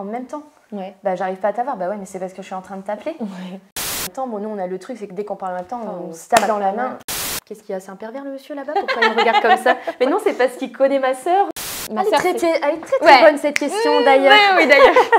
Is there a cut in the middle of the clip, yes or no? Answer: yes